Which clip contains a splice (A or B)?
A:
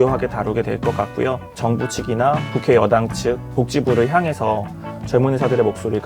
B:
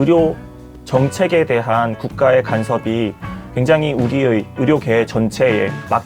A